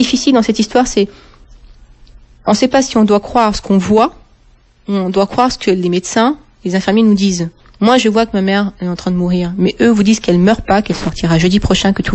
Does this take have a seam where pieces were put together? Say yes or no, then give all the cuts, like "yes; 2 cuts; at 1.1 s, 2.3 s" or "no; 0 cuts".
no; 0 cuts